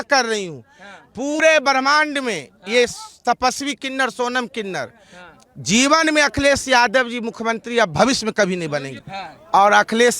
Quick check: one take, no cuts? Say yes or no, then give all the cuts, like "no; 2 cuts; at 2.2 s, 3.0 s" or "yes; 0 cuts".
no; 2 cuts; at 1.4 s, 9.1 s